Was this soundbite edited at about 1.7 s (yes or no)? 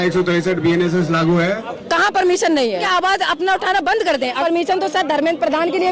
yes